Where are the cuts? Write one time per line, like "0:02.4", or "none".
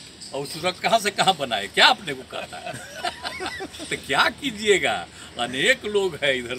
none